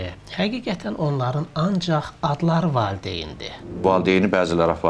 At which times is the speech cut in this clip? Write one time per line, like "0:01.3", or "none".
0:03.8